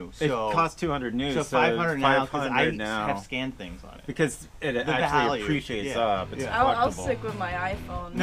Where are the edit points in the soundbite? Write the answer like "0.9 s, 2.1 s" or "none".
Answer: none